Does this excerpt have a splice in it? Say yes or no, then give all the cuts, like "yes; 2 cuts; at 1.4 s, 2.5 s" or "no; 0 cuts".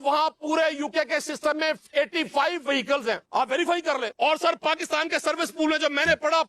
yes; 2 cuts; at 3.2 s, 4.1 s